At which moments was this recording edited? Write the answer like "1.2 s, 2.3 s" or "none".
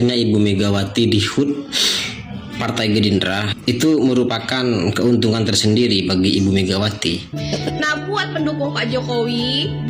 7.3 s